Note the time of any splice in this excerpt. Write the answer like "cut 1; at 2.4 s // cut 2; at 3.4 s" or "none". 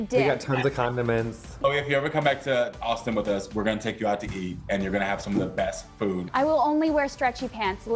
cut 1; at 1.6 s // cut 2; at 6.2 s